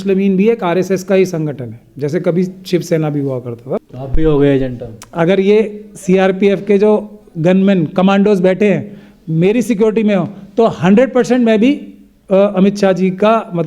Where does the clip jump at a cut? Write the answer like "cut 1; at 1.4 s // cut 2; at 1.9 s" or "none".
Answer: cut 1; at 3.8 s